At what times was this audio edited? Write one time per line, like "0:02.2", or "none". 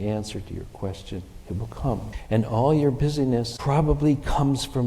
0:02.2
0:03.5